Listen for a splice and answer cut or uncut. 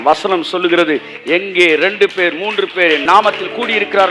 cut